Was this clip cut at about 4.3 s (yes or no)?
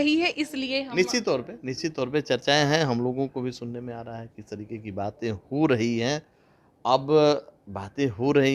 no